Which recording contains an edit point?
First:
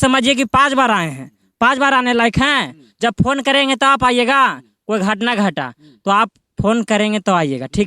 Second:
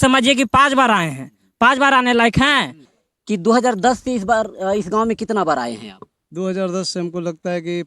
second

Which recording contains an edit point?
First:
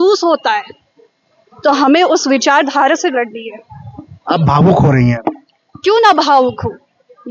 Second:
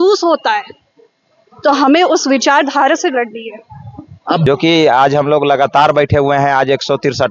second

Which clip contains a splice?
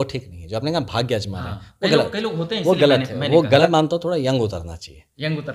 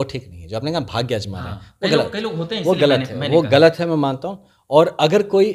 first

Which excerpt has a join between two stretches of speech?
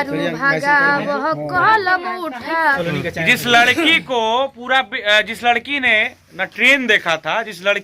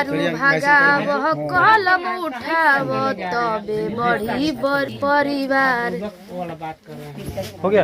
first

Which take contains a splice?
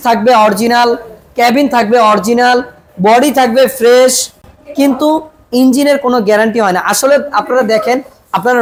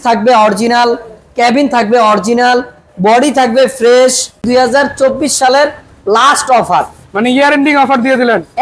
second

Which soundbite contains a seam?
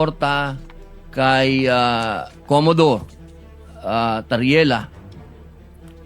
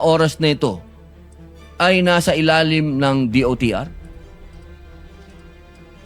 first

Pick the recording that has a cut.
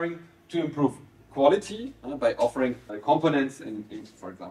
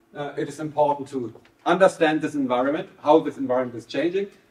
first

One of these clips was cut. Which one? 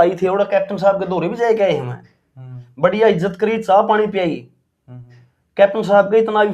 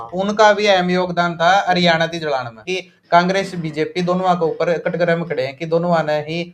second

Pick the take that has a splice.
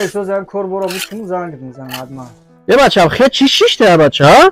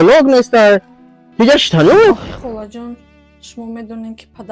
second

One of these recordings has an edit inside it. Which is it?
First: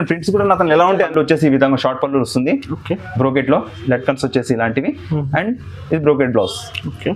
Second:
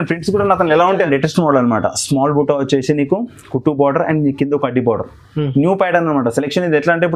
first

